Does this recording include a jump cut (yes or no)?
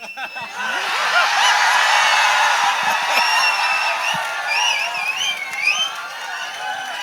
no